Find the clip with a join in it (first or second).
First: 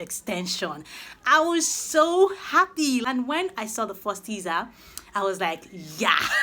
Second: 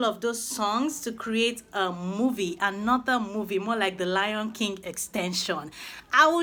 first